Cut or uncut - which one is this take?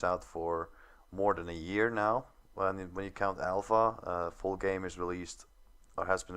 cut